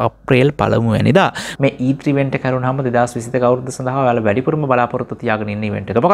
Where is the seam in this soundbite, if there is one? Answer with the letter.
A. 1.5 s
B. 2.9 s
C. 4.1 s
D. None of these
A